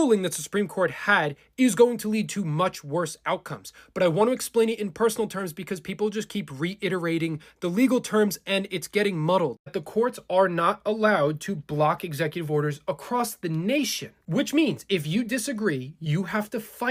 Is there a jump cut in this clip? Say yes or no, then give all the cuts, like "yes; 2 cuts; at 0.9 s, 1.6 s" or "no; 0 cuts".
no; 0 cuts